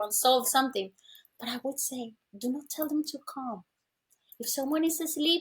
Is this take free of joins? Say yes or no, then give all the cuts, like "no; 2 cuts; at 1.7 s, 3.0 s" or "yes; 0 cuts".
yes; 0 cuts